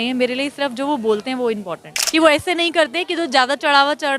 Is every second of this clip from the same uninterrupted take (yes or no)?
no